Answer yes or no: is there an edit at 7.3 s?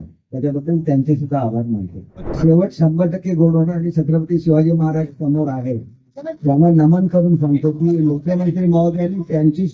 no